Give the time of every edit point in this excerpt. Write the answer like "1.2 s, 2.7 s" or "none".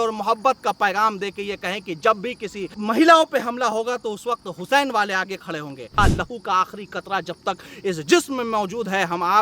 2.7 s, 6.0 s